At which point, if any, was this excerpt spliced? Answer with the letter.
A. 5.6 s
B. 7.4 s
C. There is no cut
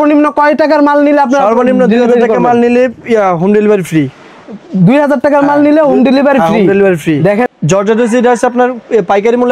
B